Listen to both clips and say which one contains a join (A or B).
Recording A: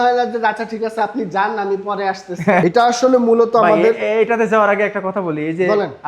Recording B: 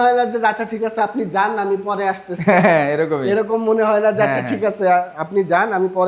A